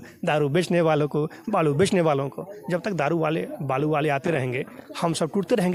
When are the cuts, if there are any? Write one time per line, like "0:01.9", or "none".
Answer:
none